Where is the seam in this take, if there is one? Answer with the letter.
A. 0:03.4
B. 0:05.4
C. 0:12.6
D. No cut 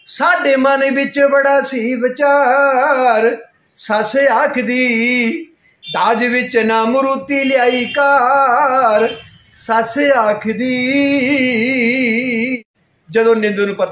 C